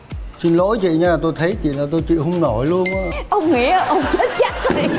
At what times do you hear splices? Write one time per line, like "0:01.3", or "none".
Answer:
0:03.2